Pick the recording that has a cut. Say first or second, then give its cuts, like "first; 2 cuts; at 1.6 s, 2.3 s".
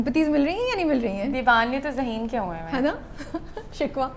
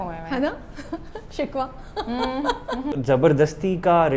second; 1 cut; at 2.9 s